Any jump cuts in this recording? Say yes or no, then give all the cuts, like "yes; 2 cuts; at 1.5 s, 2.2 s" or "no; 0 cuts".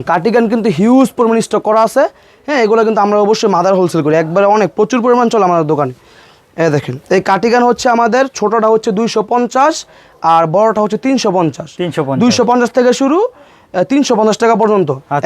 no; 0 cuts